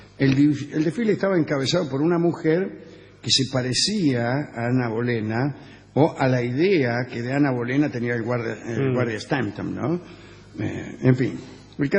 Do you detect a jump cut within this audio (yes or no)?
yes